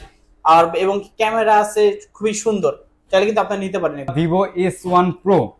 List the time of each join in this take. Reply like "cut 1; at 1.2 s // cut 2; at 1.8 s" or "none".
cut 1; at 4.1 s